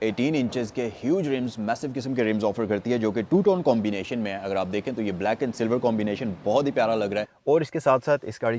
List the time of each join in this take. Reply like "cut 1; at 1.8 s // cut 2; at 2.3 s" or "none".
cut 1; at 7.3 s